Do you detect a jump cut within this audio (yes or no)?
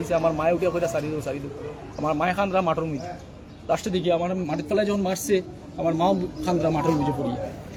no